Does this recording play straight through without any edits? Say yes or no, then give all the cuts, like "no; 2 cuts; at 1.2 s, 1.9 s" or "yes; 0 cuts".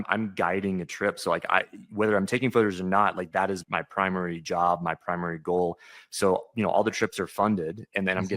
no; 1 cut; at 3.6 s